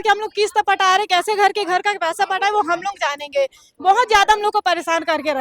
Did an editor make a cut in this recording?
no; 0 cuts

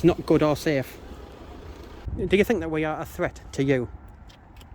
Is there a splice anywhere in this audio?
yes; 1 cut; at 2.0 s

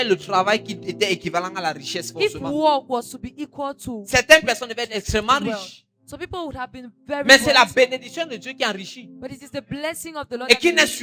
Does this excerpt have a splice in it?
no; 0 cuts

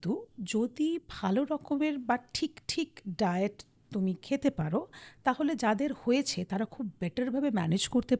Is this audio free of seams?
yes; 0 cuts

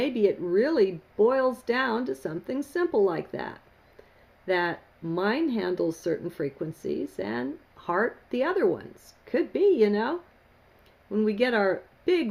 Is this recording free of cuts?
yes; 0 cuts

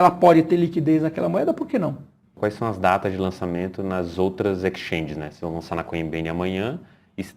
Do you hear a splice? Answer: yes; 1 cut; at 2.4 s

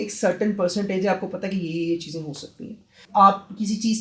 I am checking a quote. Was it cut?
yes; 1 cut; at 3.0 s

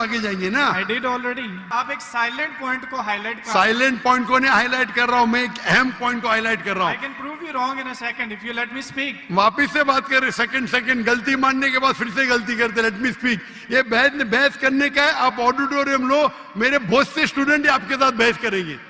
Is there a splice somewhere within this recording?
yes; 1 cut; at 1.7 s

